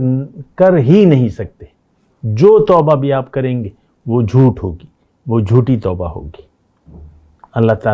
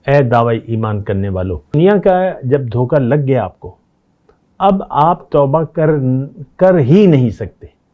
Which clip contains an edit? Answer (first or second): second